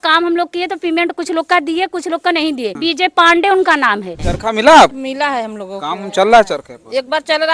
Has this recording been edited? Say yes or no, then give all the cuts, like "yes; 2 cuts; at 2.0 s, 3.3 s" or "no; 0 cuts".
yes; 3 cuts; at 2.7 s, 4.1 s, 5.0 s